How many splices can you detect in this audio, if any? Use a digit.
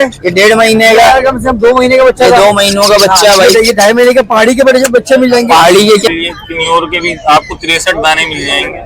1